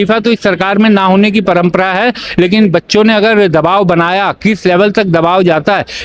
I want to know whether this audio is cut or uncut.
uncut